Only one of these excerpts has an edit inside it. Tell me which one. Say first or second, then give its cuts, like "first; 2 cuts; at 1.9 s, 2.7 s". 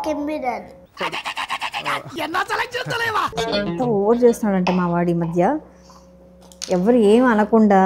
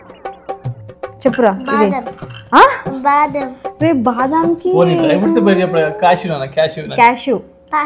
first; 1 cut; at 3.5 s